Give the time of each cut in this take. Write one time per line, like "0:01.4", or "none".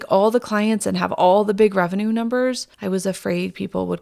0:02.7